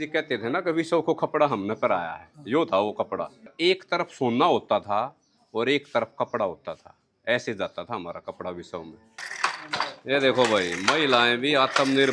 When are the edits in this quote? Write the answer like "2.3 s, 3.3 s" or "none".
3.4 s, 9.3 s